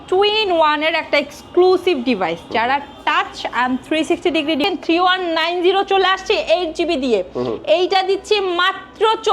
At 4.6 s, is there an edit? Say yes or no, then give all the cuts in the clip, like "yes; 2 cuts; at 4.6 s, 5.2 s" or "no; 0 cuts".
yes; 1 cut; at 4.6 s